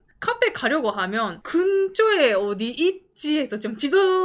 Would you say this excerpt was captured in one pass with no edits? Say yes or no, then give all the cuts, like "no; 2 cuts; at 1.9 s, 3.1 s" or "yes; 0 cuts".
no; 1 cut; at 1.4 s